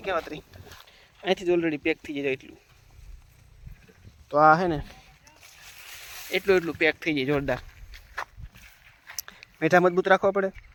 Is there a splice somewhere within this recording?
no; 0 cuts

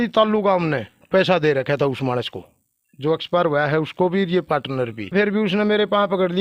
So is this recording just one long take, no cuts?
no; 1 cut; at 5.1 s

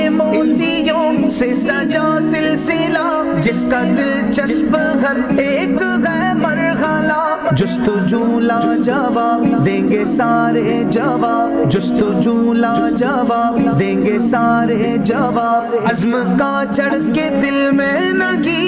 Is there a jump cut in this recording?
no; 0 cuts

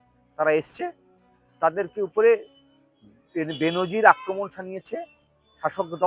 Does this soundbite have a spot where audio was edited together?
no; 0 cuts

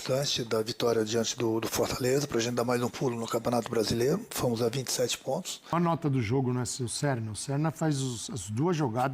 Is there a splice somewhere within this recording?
yes; 1 cut; at 5.7 s

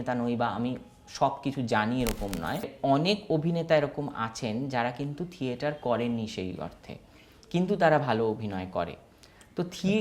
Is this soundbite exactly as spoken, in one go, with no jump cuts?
no; 1 cut; at 2.7 s

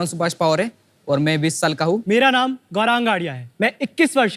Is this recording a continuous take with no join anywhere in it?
no; 2 cuts; at 2.0 s, 3.4 s

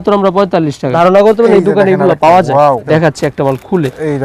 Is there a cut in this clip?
yes; 2 cuts; at 0.9 s, 2.8 s

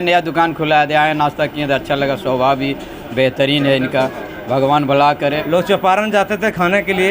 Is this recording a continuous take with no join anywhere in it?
no; 1 cut; at 5.4 s

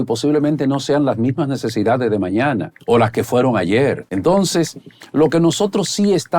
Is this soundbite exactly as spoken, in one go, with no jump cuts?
no; 2 cuts; at 2.7 s, 4.1 s

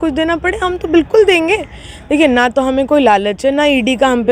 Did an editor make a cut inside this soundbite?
no; 0 cuts

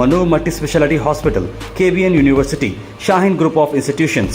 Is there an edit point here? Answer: no; 0 cuts

